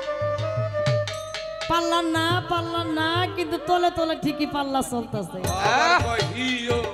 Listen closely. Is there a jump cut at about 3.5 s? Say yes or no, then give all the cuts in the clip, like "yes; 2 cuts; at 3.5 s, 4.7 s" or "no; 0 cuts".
no; 0 cuts